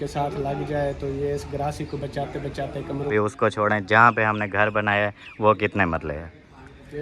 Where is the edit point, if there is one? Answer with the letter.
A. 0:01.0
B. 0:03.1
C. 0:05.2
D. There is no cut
B